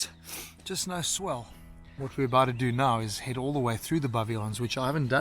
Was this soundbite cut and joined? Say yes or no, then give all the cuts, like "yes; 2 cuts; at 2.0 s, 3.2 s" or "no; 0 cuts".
yes; 1 cut; at 1.9 s